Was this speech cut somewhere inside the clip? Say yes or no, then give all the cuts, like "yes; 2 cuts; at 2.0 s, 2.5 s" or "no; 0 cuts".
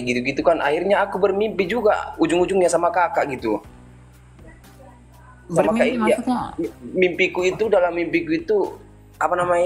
no; 0 cuts